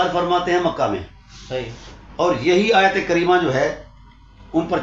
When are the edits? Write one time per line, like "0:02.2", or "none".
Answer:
none